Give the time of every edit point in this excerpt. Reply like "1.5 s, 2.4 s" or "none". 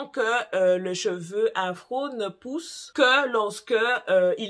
none